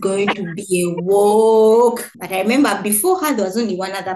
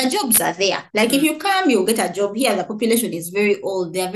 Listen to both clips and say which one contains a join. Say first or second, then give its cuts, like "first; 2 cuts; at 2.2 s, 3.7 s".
first; 1 cut; at 2.1 s